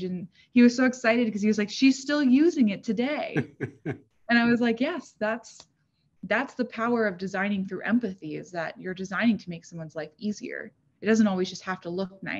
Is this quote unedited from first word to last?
yes; 0 cuts

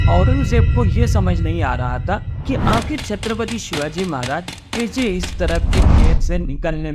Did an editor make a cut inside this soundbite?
no; 0 cuts

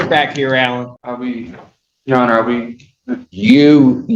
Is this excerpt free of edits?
no; 1 cut; at 1.0 s

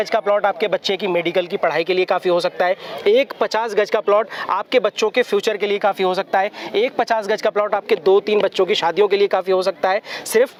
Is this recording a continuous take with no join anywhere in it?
yes; 0 cuts

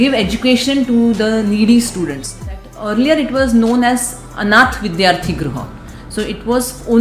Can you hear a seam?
yes; 1 cut; at 2.6 s

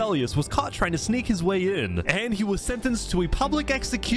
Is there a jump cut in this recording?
no; 0 cuts

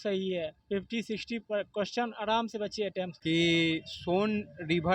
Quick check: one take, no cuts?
no; 1 cut; at 3.1 s

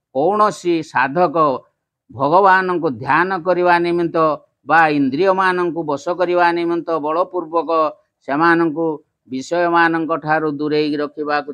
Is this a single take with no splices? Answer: yes; 0 cuts

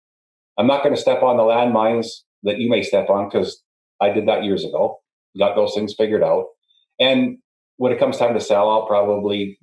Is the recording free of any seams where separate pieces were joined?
no; 1 cut; at 5.0 s

